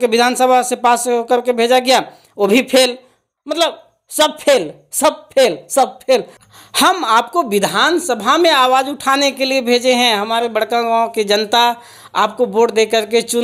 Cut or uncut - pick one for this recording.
cut